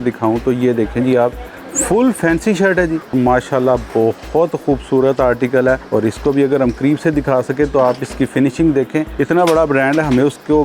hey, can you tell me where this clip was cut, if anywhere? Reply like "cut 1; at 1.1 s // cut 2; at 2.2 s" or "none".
cut 1; at 3.1 s // cut 2; at 5.8 s // cut 3; at 9.1 s